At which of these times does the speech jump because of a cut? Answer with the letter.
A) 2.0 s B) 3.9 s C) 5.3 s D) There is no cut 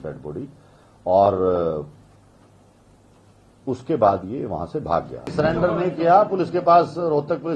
C